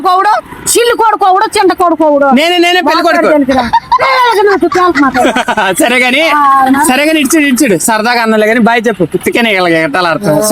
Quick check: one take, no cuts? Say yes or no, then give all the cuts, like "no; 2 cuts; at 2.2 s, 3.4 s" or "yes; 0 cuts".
no; 1 cut; at 3.9 s